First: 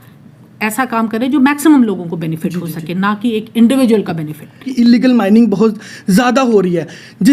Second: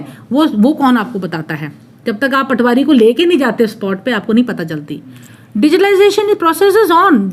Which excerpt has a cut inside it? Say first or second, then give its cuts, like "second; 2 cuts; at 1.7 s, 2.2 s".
first; 1 cut; at 4.7 s